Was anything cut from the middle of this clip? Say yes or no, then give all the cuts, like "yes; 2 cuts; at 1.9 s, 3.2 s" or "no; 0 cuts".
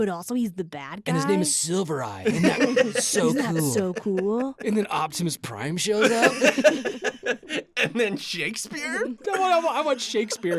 yes; 1 cut; at 4.6 s